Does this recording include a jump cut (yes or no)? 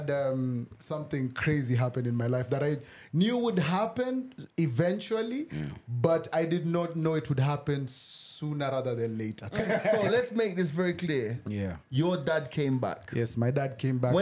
yes